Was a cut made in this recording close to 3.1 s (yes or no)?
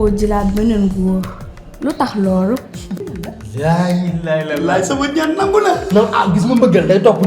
yes